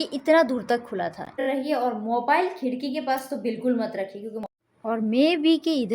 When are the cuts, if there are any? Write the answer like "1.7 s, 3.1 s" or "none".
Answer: 1.4 s, 4.5 s